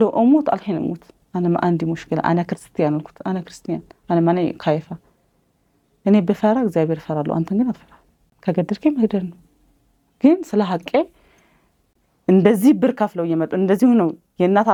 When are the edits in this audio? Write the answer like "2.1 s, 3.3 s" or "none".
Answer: none

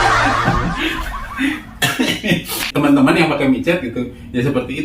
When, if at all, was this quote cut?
2.7 s

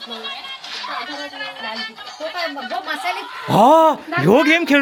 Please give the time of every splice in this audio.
none

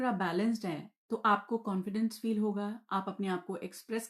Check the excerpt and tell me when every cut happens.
none

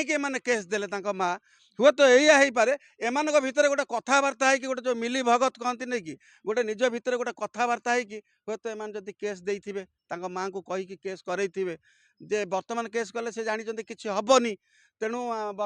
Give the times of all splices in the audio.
none

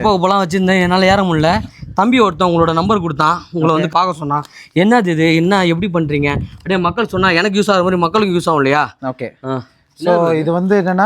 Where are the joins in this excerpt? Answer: 3.9 s

